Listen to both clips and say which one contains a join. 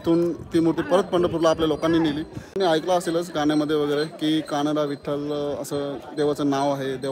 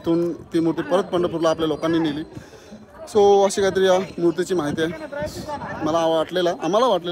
first; 1 cut; at 2.5 s

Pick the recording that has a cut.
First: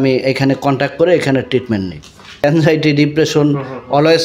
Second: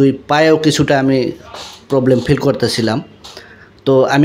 first; 1 cut; at 2.4 s

